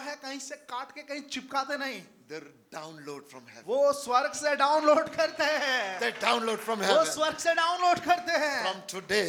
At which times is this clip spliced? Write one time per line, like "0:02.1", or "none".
none